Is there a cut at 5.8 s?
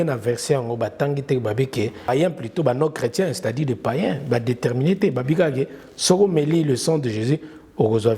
no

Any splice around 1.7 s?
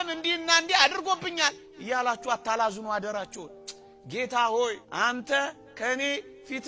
no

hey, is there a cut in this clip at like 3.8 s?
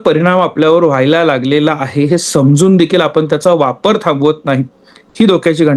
no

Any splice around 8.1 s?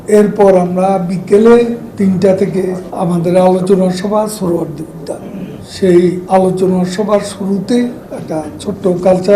yes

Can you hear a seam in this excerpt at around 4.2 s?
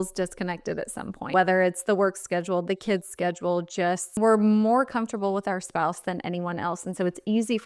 yes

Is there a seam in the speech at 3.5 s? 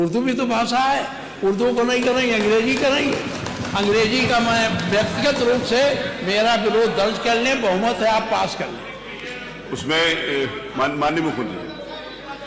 no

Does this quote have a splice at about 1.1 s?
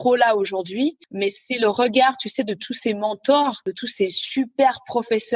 yes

